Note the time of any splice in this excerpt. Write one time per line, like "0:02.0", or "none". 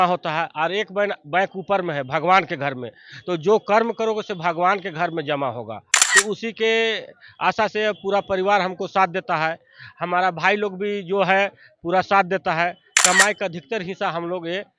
none